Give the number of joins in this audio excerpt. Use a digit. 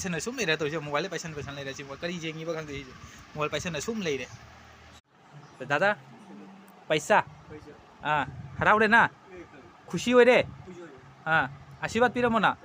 1